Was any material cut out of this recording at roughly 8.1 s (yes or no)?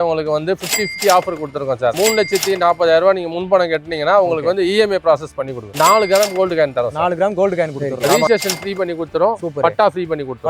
yes